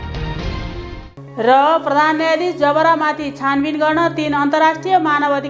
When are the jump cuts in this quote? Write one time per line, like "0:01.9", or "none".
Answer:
0:01.0